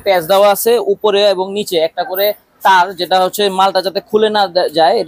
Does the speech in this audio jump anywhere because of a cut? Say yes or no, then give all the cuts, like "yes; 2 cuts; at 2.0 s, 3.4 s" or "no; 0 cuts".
no; 0 cuts